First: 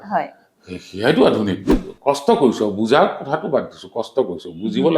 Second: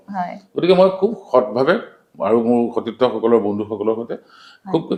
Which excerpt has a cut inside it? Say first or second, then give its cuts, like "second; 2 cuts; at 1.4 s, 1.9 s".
first; 1 cut; at 1.9 s